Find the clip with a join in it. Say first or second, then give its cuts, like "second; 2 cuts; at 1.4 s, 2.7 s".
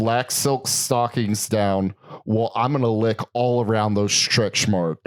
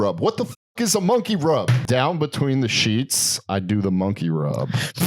second; 1 cut; at 1.8 s